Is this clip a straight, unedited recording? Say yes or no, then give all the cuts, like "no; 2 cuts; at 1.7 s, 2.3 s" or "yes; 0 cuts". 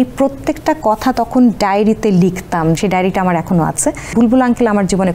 no; 2 cuts; at 2.8 s, 4.1 s